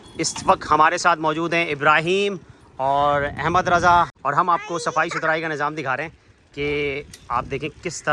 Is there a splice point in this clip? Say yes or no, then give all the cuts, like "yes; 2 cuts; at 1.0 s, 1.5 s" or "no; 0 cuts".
yes; 1 cut; at 4.1 s